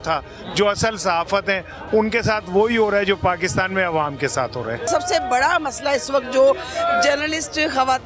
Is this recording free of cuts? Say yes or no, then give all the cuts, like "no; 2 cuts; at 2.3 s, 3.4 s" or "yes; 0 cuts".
no; 1 cut; at 4.8 s